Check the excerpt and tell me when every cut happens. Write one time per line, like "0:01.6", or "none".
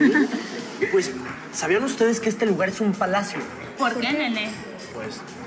none